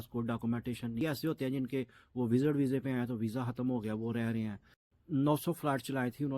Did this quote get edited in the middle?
yes; 2 cuts; at 1.0 s, 4.9 s

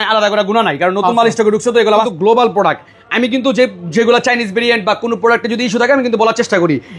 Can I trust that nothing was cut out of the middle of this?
no; 1 cut; at 2.1 s

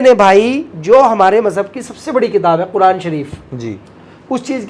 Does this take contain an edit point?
no; 0 cuts

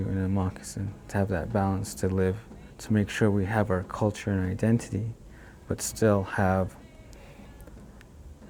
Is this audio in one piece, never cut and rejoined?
yes; 0 cuts

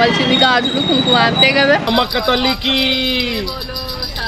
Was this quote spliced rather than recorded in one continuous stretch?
yes; 1 cut; at 1.8 s

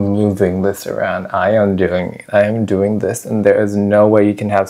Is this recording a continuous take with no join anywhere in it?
yes; 0 cuts

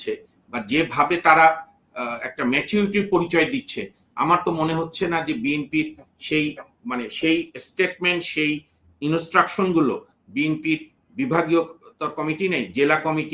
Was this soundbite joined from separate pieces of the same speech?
no; 0 cuts

